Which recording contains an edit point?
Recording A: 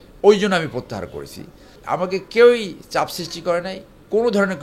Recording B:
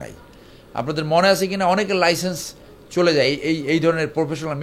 A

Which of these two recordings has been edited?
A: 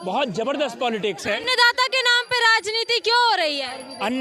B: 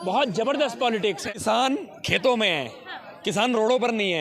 B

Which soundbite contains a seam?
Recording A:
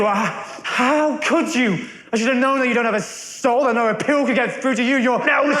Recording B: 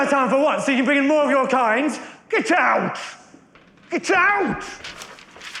B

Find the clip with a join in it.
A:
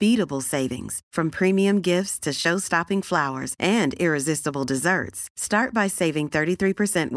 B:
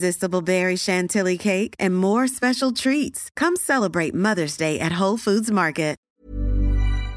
B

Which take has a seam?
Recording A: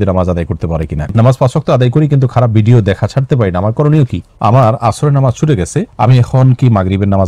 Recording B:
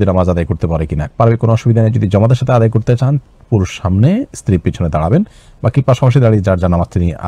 A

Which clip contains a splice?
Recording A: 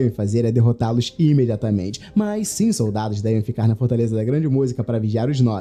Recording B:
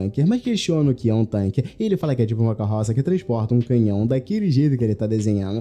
B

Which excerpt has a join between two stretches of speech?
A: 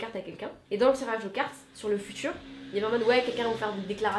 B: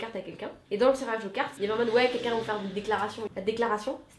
B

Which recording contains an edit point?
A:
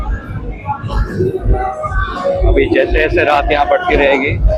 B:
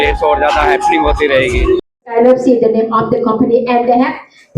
B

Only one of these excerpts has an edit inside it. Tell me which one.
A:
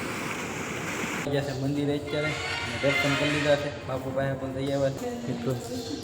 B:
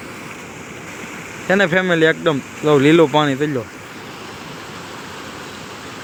A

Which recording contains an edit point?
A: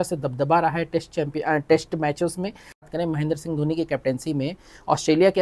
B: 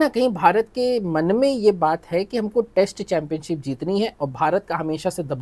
A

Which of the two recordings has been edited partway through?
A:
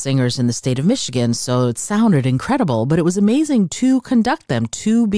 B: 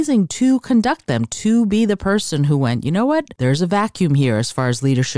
B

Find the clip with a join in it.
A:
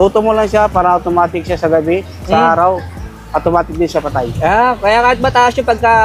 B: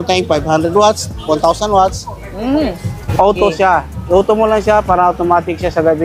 B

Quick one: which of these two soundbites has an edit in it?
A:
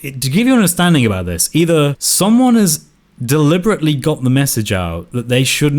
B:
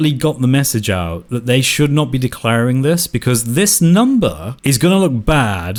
A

